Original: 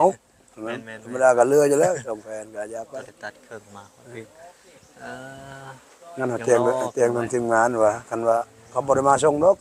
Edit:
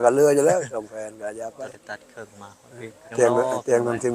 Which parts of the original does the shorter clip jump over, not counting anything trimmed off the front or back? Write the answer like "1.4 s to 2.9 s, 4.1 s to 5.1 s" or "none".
4.5 s to 6.4 s

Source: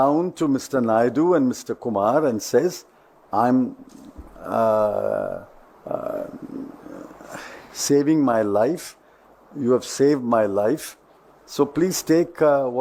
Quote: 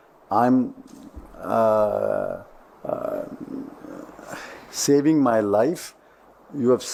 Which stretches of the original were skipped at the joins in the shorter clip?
none

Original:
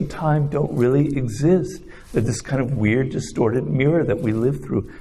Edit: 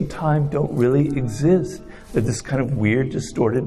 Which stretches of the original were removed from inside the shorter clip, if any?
none

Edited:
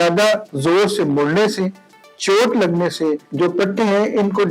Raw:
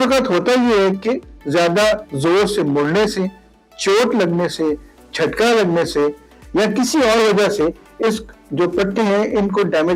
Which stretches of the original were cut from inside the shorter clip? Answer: 4.8 s to 8.4 s

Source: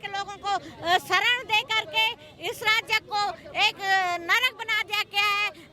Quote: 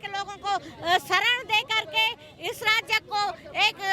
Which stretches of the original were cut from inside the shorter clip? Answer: none

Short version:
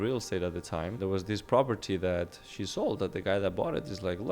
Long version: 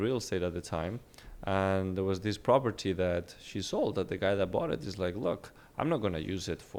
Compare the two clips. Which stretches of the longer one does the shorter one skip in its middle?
1.0 s to 1.9 s

